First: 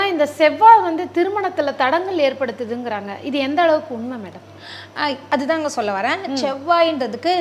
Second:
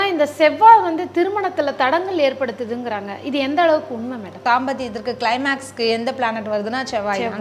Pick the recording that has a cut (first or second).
second